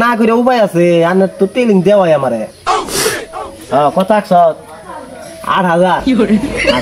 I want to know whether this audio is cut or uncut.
uncut